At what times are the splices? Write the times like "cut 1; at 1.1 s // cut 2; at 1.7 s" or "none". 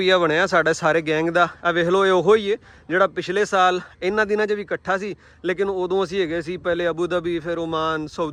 none